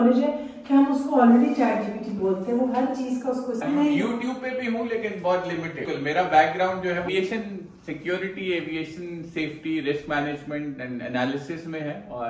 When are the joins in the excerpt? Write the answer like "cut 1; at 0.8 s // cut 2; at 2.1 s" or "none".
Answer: cut 1; at 3.6 s // cut 2; at 5.9 s // cut 3; at 7.1 s